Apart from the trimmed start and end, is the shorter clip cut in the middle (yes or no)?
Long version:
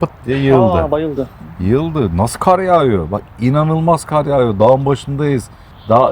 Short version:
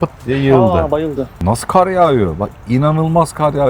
yes